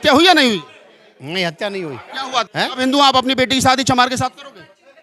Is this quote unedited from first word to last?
no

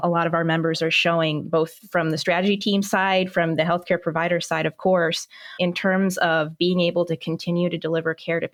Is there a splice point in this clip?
no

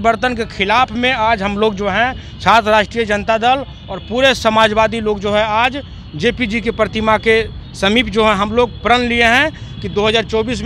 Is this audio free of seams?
yes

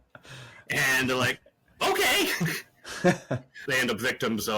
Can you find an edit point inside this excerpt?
yes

